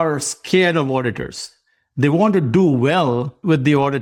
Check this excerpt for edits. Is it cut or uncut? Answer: uncut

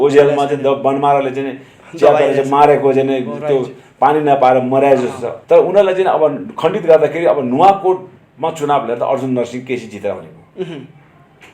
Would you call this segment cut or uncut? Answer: cut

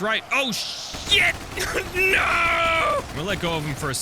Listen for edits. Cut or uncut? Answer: cut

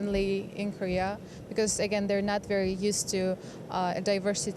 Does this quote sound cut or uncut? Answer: uncut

